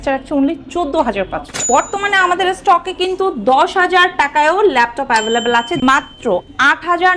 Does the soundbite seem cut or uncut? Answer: cut